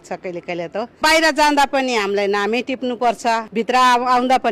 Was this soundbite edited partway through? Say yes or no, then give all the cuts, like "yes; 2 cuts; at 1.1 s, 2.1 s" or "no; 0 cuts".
yes; 2 cuts; at 1.0 s, 3.5 s